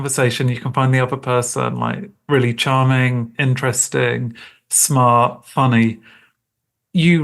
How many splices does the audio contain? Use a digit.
0